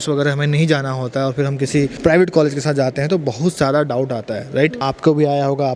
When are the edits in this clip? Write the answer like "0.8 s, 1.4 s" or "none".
1.9 s, 4.8 s